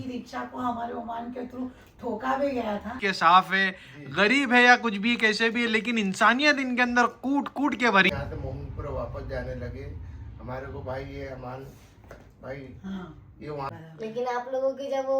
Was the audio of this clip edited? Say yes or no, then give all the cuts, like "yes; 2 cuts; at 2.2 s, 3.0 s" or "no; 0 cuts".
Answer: yes; 3 cuts; at 3.0 s, 8.1 s, 13.7 s